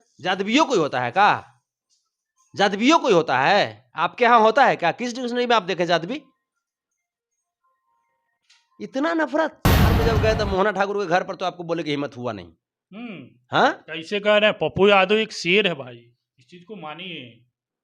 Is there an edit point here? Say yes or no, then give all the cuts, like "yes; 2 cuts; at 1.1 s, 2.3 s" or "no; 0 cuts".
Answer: yes; 1 cut; at 10.0 s